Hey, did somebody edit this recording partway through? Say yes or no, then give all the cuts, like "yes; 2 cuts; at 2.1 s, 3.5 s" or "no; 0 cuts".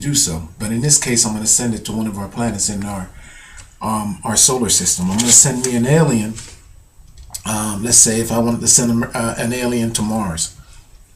yes; 1 cut; at 9.9 s